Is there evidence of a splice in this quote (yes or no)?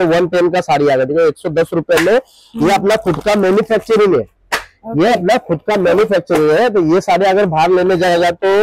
no